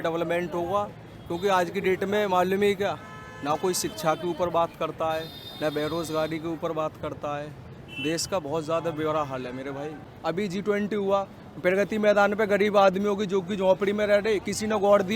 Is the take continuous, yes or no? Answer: no